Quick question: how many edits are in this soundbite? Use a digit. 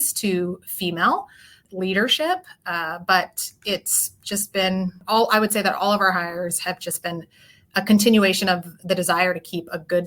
2